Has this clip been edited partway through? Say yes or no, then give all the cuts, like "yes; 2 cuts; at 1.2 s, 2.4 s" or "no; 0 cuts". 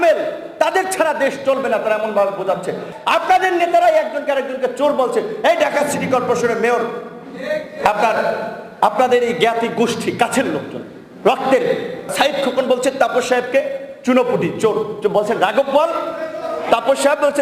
yes; 2 cuts; at 2.9 s, 12.1 s